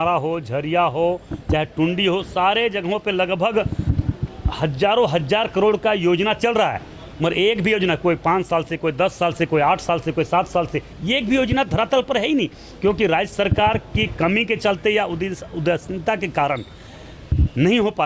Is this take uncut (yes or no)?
yes